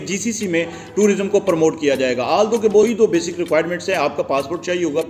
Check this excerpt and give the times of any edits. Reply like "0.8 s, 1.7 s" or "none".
2.8 s